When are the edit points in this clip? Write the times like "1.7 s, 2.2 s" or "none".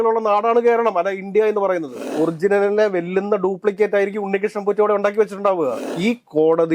2.1 s, 5.8 s

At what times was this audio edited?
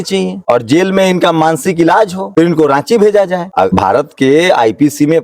2.2 s, 3.6 s

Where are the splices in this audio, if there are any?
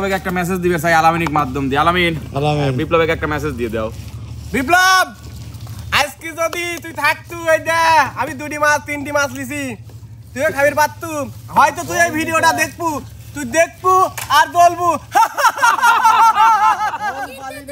none

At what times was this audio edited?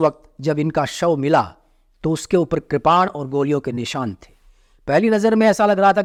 none

